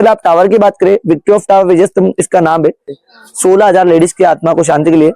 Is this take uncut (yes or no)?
no